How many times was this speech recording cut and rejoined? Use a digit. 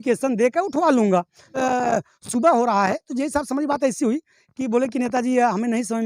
1